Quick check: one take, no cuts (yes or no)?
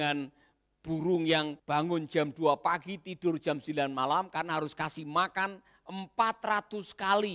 no